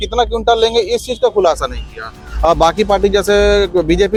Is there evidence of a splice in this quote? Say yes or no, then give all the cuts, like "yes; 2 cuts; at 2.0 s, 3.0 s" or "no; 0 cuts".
no; 0 cuts